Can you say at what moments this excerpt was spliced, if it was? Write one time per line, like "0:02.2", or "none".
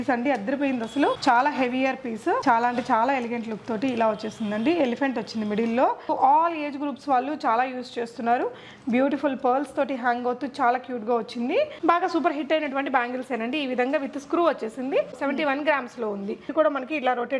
0:01.2
0:02.4
0:06.1
0:11.7
0:16.5